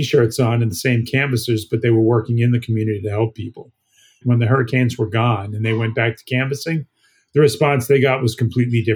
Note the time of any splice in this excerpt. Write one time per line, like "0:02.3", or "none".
0:04.2